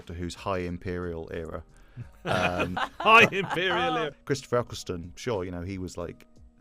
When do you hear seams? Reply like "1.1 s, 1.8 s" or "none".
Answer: 4.1 s